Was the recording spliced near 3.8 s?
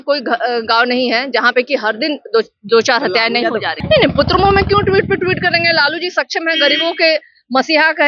yes; 1 cut; at 3.8 s

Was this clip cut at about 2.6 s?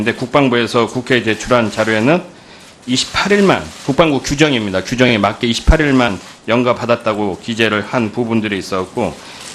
no; 0 cuts

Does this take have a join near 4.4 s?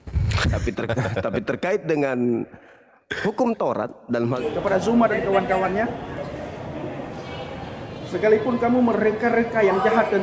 yes; 1 cut; at 4.4 s

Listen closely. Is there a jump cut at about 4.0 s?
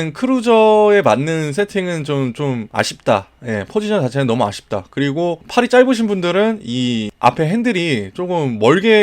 no; 3 cuts; at 2.7 s, 5.4 s, 7.1 s

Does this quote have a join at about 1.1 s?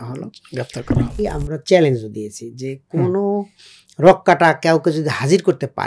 yes; 1 cut; at 1.1 s

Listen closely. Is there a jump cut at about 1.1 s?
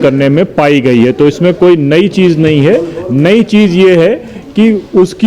no; 0 cuts

